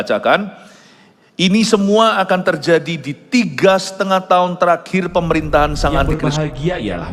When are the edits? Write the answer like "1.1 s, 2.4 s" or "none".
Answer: 6.1 s